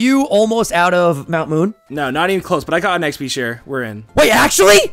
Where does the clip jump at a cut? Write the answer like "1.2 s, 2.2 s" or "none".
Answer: 1.8 s, 4.0 s